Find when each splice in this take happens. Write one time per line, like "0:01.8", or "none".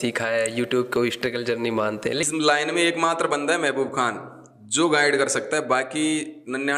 0:02.3